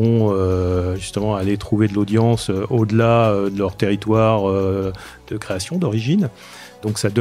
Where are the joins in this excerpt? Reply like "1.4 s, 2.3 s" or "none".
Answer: none